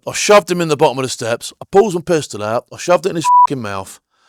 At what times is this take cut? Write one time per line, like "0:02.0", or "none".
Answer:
none